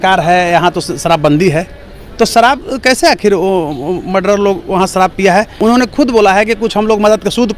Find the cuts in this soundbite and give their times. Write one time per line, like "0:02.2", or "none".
0:05.5